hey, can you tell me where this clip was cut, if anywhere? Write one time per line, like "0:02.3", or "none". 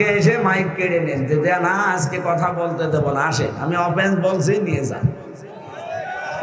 none